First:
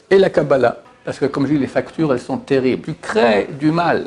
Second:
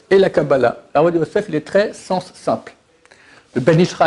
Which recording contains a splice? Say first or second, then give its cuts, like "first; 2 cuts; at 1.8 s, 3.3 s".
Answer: first; 2 cuts; at 0.8 s, 2.9 s